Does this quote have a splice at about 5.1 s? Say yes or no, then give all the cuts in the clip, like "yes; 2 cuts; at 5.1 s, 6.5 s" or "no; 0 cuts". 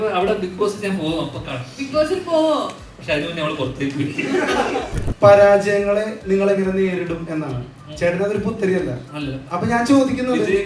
yes; 1 cut; at 5.1 s